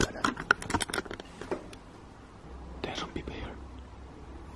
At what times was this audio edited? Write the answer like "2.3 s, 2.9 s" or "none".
2.4 s